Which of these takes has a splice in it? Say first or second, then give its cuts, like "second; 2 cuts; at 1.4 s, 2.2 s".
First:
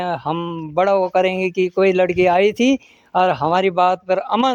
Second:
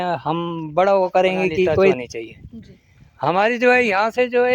second; 1 cut; at 1.9 s